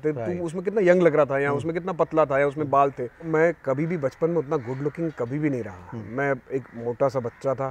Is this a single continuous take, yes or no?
no